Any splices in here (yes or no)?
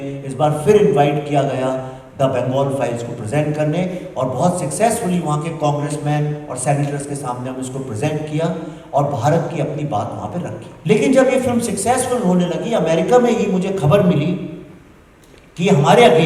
yes